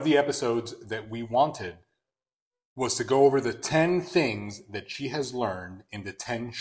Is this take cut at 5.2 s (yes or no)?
no